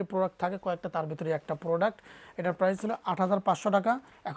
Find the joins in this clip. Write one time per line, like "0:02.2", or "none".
none